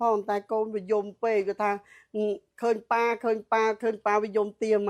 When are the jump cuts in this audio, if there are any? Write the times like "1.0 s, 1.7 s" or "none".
none